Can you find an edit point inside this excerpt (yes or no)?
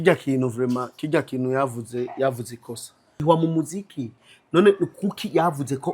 yes